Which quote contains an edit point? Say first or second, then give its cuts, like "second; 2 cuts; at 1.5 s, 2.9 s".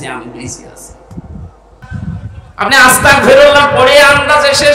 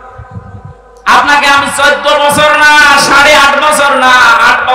first; 1 cut; at 1.9 s